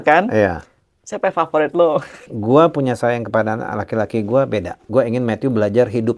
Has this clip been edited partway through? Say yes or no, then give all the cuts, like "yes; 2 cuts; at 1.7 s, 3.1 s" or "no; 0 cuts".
yes; 2 cuts; at 2.2 s, 4.8 s